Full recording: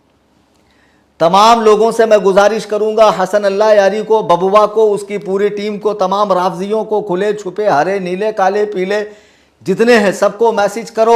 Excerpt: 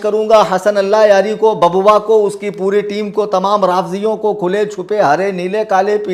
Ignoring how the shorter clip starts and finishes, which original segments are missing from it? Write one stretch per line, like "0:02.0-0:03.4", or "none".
none